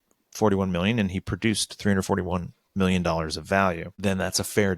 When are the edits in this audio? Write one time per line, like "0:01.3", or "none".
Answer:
0:03.9